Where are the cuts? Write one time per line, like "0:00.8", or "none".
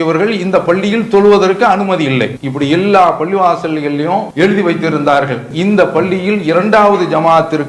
0:02.4
0:04.3
0:05.5